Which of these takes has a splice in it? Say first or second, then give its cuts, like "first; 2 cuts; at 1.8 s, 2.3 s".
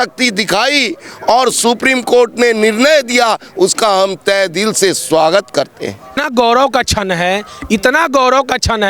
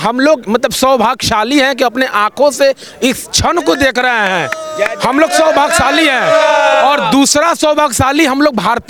first; 1 cut; at 6.2 s